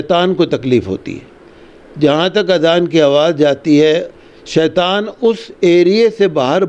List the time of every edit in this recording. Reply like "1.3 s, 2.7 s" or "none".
none

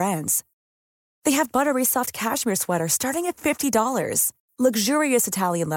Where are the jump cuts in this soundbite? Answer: none

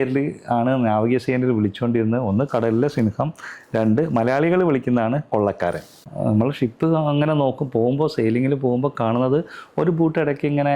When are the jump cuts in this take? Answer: 6.1 s

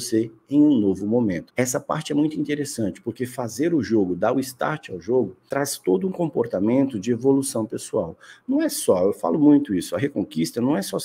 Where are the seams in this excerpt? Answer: 1.5 s, 5.4 s

